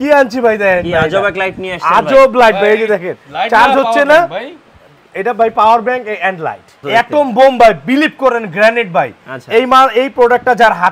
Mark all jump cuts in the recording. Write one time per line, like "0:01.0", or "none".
0:06.7

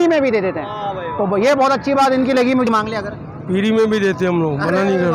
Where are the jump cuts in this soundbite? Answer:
0:02.7

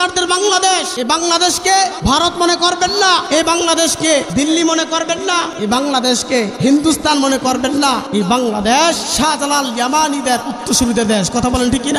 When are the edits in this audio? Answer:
0:00.9
0:02.0
0:03.2
0:04.3
0:05.5
0:06.5
0:08.0
0:09.1

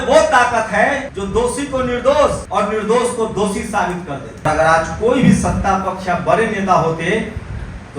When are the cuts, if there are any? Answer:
0:01.1
0:02.4
0:04.5

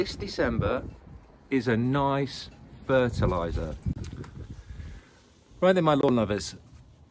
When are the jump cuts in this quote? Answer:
0:04.2

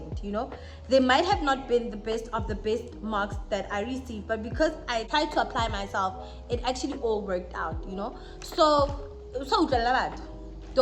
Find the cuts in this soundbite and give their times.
0:05.1

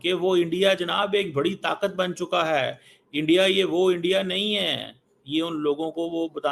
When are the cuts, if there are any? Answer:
none

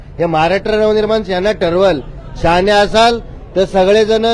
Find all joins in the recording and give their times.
none

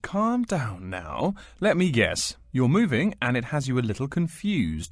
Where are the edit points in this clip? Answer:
none

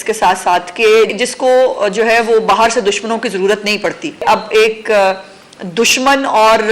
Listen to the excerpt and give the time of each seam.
0:01.2
0:04.2

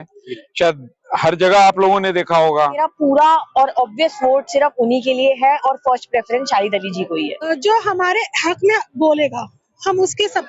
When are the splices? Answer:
0:02.8
0:07.5

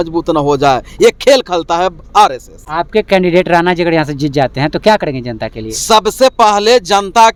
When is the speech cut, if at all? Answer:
none

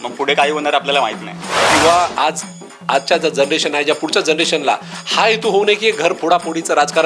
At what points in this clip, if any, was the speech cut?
0:01.7

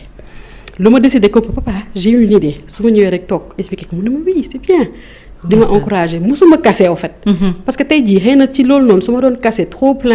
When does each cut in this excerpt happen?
none

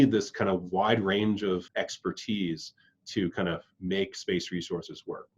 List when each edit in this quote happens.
0:01.7

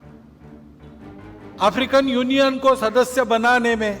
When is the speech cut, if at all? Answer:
none

